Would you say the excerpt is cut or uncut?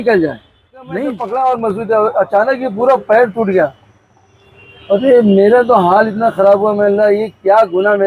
cut